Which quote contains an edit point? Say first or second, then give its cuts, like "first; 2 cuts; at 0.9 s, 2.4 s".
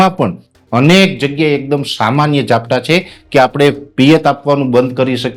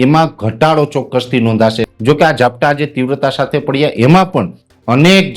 second; 1 cut; at 1.9 s